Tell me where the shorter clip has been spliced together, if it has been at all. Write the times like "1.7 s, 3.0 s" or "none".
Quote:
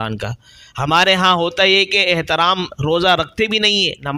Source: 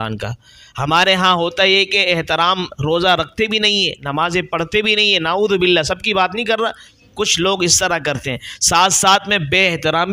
none